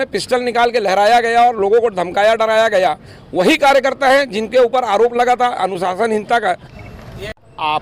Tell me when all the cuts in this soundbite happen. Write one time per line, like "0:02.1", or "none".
0:06.7